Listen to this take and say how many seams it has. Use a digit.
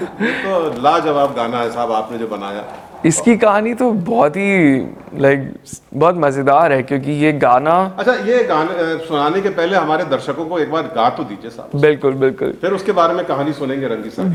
0